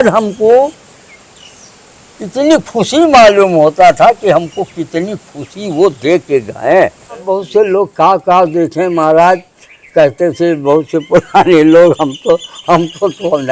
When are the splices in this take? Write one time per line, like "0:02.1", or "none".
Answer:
0:07.3